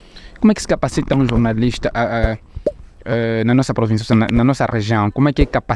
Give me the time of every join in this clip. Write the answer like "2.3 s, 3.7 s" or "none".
none